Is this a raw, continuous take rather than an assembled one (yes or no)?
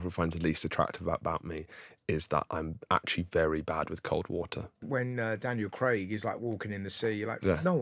no